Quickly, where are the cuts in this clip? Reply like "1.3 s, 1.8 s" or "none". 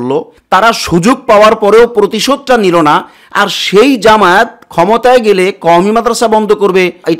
none

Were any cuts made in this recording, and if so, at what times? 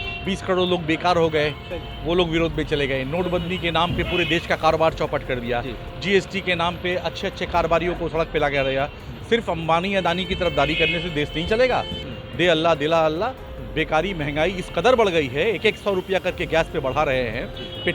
12.0 s

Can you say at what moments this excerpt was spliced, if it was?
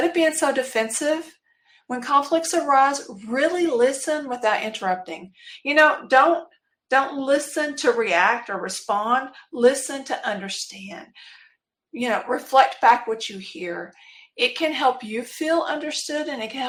none

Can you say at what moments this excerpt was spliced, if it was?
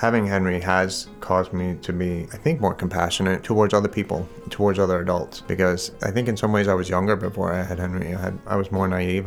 2.3 s, 3.4 s, 5.4 s, 5.9 s, 8.4 s

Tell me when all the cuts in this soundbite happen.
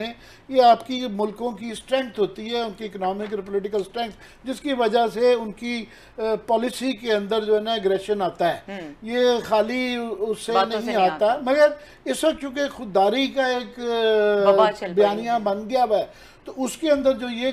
none

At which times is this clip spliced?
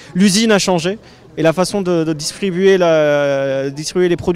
none

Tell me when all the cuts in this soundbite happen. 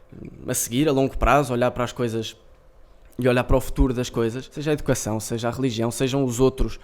4.5 s

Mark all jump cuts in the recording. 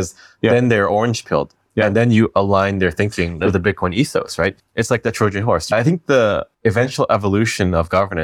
3.4 s, 4.6 s, 5.7 s, 6.5 s

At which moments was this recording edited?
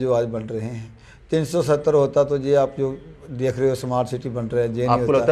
none

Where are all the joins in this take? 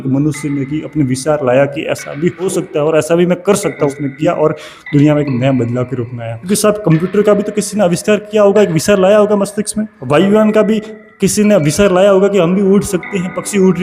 2.5 s, 4.1 s, 6.4 s, 10.0 s

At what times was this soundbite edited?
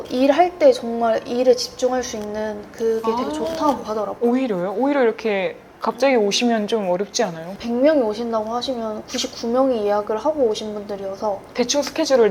7.6 s

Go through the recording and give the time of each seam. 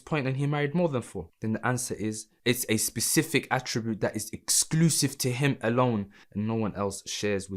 1.2 s, 2.3 s, 6.2 s

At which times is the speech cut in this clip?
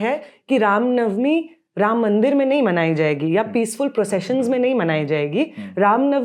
none

